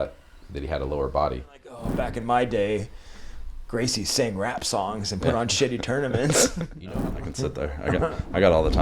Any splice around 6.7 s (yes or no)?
yes